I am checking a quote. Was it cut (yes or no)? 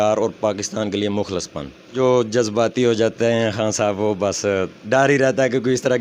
yes